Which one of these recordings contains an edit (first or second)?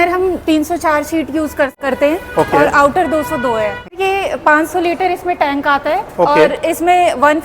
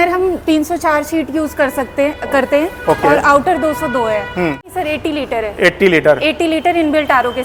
first